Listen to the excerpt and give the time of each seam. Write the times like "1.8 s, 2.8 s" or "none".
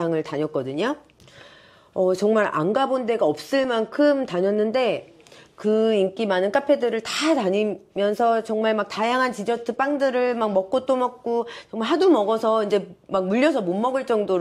none